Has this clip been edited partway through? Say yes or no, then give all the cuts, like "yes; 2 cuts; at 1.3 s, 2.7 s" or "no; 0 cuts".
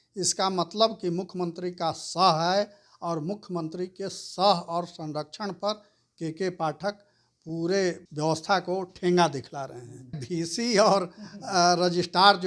yes; 2 cuts; at 8.0 s, 10.2 s